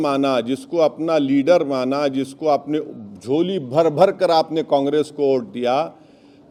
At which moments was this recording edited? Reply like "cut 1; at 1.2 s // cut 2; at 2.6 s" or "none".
none